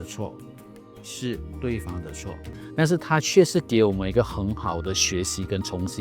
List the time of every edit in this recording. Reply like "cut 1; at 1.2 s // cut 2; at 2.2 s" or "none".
cut 1; at 2.6 s